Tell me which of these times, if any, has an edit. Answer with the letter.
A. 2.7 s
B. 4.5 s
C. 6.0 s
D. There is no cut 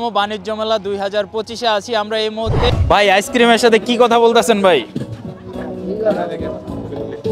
A